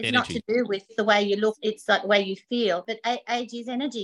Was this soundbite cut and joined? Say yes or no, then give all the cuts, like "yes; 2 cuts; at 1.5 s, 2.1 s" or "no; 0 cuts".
yes; 3 cuts; at 0.9 s, 1.6 s, 2.9 s